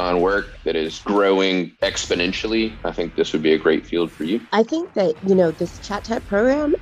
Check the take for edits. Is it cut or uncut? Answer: cut